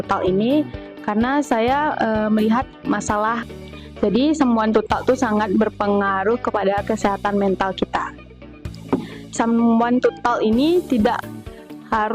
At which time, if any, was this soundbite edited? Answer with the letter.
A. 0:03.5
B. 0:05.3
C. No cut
A